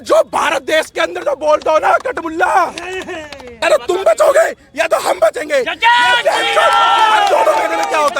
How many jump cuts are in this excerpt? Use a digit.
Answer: 1